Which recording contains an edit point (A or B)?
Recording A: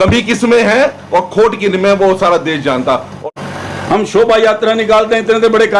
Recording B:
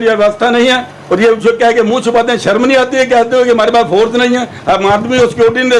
A